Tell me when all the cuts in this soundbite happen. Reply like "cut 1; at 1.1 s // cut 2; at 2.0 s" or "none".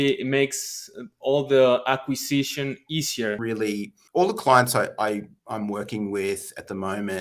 cut 1; at 3.4 s